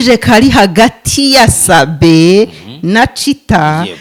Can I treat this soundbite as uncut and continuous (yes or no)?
yes